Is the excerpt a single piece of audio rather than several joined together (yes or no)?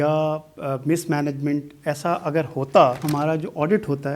no